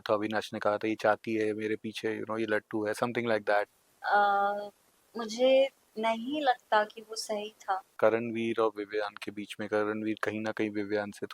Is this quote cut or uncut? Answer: cut